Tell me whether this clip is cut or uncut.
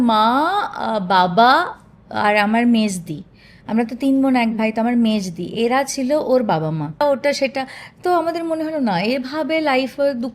cut